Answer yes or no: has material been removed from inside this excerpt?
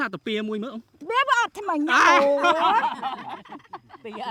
no